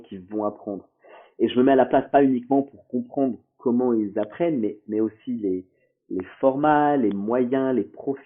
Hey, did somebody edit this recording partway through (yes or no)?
no